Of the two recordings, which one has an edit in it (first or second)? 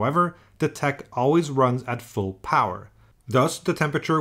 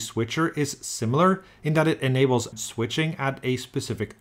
second